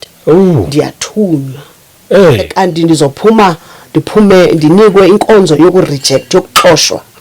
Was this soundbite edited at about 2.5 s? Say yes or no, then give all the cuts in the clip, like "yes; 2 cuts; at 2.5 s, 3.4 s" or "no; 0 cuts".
yes; 1 cut; at 2.5 s